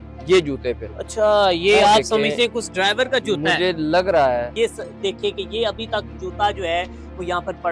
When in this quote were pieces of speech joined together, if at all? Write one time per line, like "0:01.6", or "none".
0:00.9
0:04.5